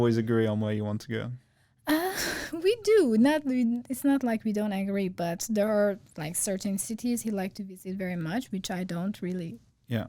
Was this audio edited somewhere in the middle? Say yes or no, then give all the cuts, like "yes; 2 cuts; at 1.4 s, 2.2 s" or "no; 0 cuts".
no; 0 cuts